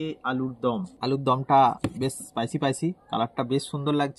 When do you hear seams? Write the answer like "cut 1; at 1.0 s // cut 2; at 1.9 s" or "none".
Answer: cut 1; at 0.9 s